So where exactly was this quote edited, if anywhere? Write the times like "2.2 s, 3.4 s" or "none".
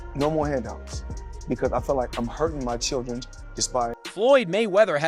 4.0 s